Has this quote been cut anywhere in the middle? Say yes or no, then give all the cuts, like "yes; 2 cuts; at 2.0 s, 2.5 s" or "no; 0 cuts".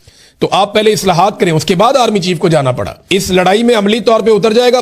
yes; 1 cut; at 2.9 s